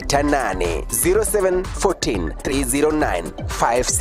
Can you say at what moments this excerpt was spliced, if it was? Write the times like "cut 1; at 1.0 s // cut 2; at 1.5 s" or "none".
cut 1; at 2.5 s